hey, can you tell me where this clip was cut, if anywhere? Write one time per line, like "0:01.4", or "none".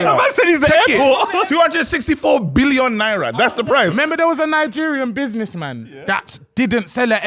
0:01.3